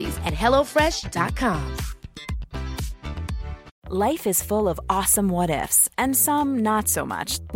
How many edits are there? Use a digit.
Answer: 1